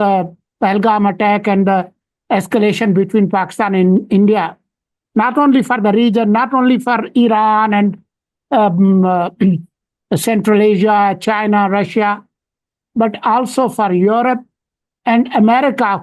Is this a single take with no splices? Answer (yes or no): yes